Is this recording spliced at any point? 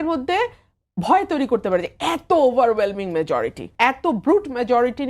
yes; 1 cut; at 3.6 s

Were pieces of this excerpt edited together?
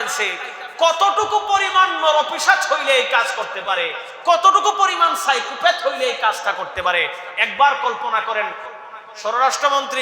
yes; 1 cut; at 8.6 s

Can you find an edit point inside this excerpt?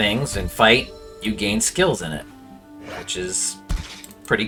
no; 0 cuts

